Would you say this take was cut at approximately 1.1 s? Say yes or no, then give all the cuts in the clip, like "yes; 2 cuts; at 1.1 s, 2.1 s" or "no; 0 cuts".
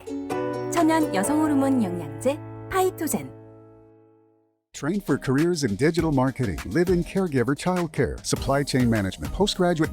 no; 1 cut; at 4.6 s